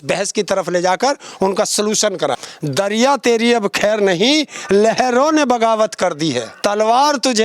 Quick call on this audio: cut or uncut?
cut